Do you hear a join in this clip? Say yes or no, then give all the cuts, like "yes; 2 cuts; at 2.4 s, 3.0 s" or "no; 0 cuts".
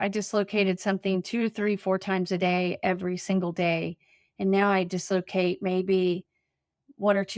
no; 0 cuts